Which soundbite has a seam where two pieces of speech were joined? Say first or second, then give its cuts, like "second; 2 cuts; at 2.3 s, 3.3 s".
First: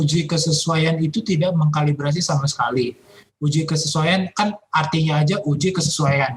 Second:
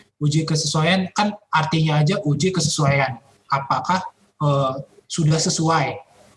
second; 1 cut; at 5.0 s